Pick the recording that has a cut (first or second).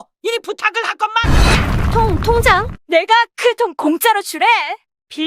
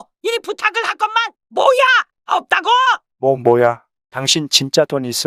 first